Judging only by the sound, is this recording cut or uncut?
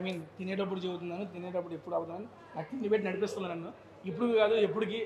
uncut